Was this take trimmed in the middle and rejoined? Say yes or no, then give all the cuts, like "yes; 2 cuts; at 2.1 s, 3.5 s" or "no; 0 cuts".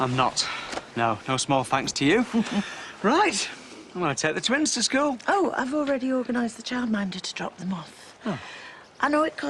yes; 1 cut; at 4.7 s